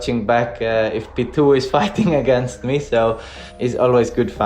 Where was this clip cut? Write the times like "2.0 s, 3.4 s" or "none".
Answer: 3.4 s